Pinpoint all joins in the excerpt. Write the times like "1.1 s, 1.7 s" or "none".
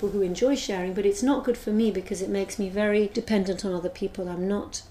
3.1 s

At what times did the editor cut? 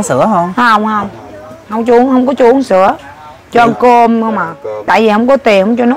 4.9 s

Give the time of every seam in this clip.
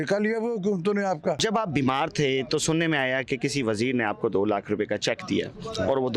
1.4 s

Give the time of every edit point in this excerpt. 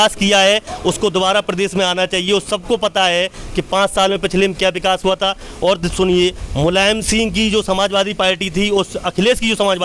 none

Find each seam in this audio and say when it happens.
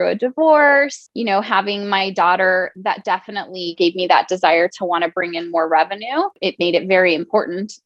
1.0 s, 3.7 s, 6.4 s

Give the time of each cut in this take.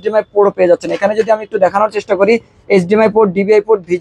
none

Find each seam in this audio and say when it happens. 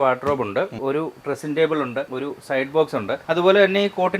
0.8 s, 2.1 s, 3.2 s

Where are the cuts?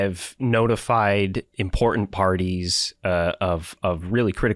none

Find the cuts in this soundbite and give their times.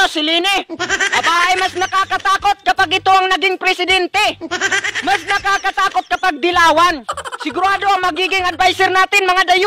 4.4 s

